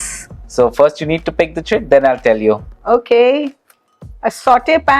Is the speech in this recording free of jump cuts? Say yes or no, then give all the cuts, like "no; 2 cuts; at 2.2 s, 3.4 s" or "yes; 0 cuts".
yes; 0 cuts